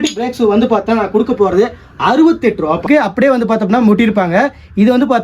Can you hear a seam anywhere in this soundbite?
yes; 1 cut; at 2.9 s

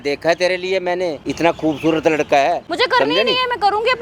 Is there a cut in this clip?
yes; 2 cuts; at 1.2 s, 2.7 s

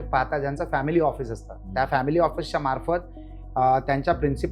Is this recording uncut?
yes; 0 cuts

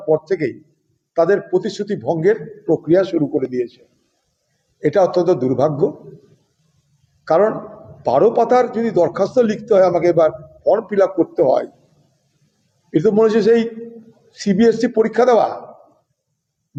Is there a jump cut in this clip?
no; 0 cuts

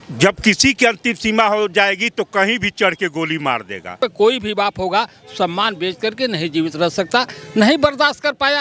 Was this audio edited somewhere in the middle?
yes; 1 cut; at 4.0 s

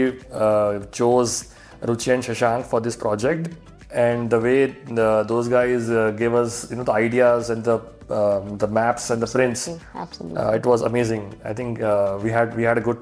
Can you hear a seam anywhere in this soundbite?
no; 0 cuts

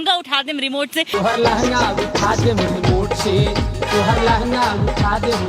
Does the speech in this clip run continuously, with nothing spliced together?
yes; 0 cuts

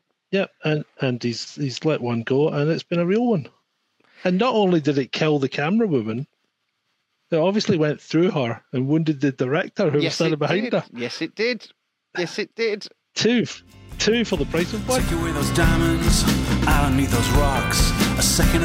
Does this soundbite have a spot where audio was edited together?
yes; 1 cut; at 15.1 s

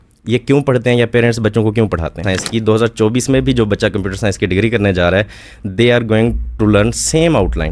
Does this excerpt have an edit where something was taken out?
yes; 1 cut; at 2.2 s

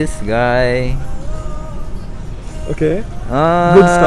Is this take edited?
no; 0 cuts

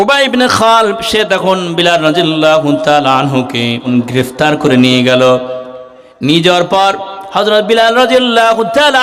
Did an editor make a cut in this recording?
yes; 1 cut; at 3.8 s

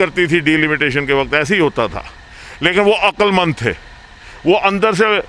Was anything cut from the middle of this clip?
no; 0 cuts

